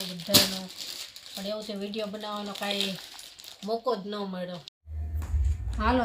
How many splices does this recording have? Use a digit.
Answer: 1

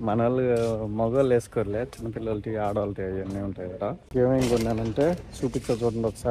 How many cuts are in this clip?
0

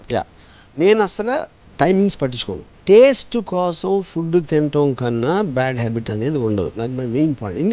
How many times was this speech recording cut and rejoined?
1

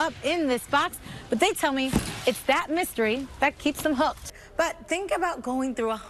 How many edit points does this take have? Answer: 1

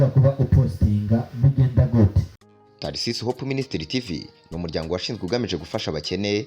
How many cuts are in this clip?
1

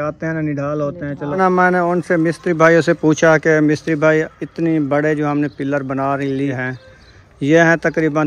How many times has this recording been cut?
2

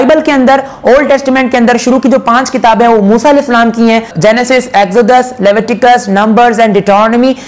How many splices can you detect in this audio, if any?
1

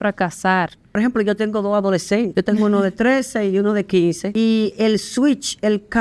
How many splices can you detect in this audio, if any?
3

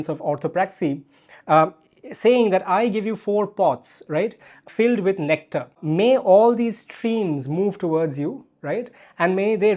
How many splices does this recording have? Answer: 1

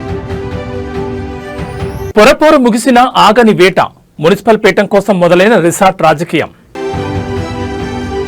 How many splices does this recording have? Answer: 1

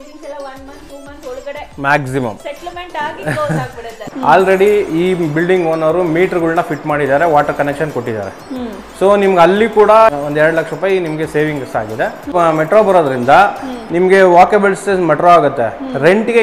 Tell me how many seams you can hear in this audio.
3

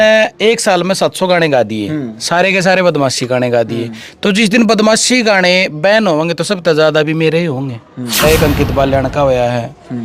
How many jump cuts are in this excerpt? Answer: 1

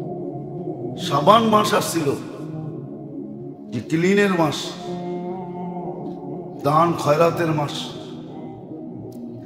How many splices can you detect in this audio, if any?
5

